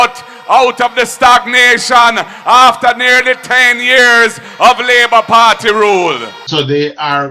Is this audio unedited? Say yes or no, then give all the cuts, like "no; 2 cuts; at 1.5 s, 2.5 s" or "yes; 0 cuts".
no; 1 cut; at 6.4 s